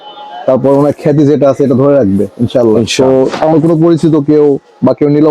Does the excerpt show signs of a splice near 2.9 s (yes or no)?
yes